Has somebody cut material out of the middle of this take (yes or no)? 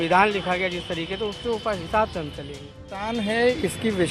yes